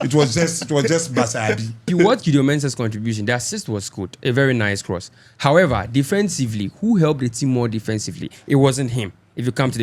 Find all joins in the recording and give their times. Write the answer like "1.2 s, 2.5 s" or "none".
1.8 s